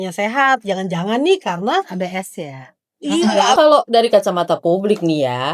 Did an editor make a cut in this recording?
yes; 1 cut; at 3.5 s

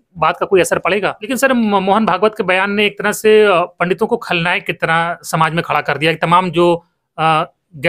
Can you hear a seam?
yes; 1 cut; at 1.2 s

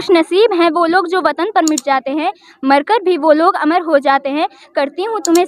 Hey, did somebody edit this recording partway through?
no; 0 cuts

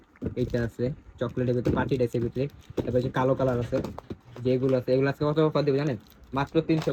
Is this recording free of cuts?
yes; 0 cuts

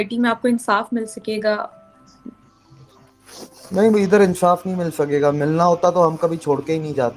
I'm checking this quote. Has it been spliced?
no; 0 cuts

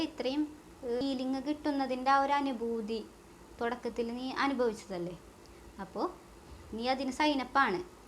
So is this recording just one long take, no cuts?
no; 1 cut; at 1.0 s

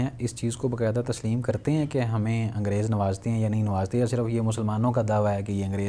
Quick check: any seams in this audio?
no; 0 cuts

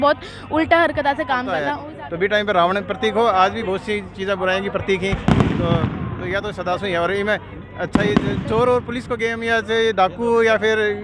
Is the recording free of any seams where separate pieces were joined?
no; 1 cut; at 1.8 s

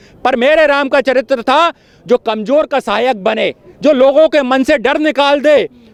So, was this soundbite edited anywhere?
no; 0 cuts

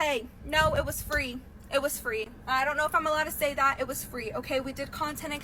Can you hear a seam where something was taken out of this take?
no; 0 cuts

